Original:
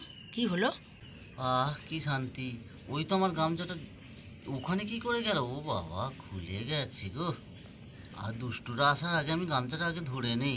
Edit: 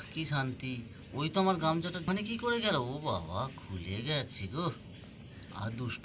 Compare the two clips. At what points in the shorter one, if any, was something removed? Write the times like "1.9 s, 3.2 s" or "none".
2.0 s